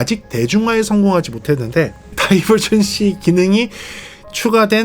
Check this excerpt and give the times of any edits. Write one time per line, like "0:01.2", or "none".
0:02.1